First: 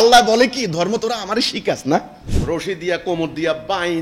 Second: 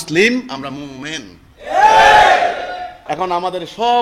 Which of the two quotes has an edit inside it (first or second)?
first